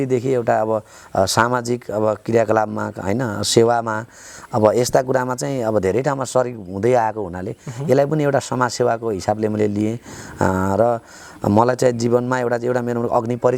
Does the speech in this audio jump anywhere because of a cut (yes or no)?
no